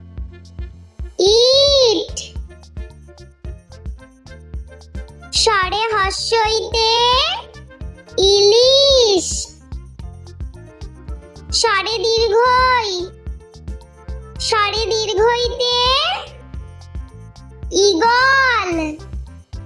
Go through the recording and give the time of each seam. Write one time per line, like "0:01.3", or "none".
0:02.3
0:05.2